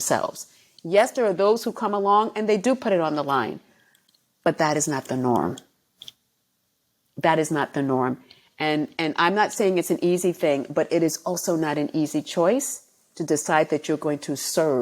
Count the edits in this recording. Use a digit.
0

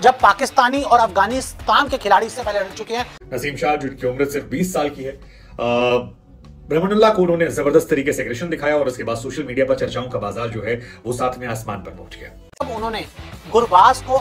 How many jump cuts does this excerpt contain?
2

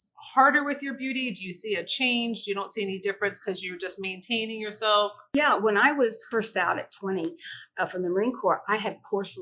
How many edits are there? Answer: 2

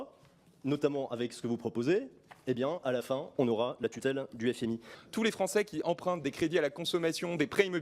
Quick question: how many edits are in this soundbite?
1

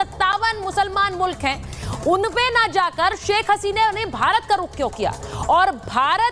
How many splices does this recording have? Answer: 0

